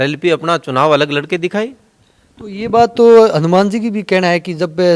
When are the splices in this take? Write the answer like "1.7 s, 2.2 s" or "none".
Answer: none